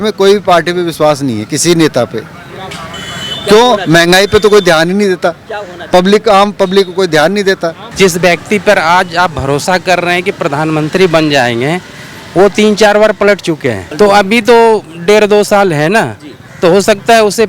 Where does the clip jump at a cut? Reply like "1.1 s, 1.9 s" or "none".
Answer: 7.8 s, 13.8 s